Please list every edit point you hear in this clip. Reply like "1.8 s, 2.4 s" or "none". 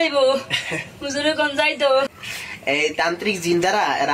2.1 s